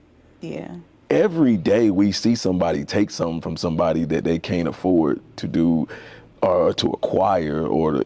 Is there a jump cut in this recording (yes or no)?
no